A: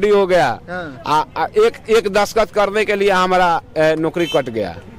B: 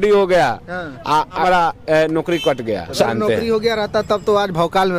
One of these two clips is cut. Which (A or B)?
B